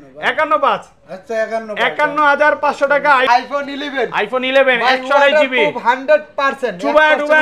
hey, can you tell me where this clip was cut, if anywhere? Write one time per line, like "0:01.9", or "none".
0:03.3